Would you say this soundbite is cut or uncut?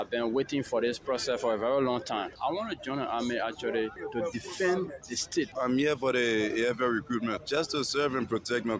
cut